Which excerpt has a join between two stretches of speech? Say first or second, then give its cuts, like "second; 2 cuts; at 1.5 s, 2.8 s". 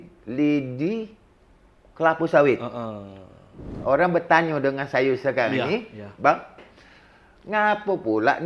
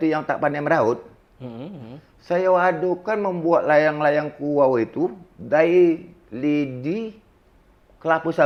first; 1 cut; at 3.7 s